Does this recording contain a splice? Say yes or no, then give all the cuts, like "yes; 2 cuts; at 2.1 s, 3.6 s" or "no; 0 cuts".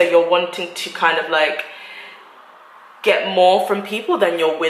no; 0 cuts